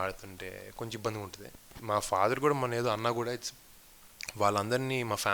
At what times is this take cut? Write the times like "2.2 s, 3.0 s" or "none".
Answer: 1.7 s